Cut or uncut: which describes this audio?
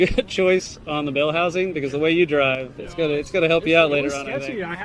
uncut